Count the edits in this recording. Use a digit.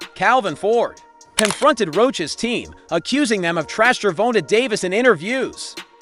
1